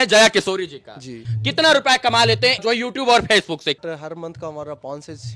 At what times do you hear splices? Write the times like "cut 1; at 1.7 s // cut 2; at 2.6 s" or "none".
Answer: cut 1; at 1.3 s // cut 2; at 2.6 s // cut 3; at 3.8 s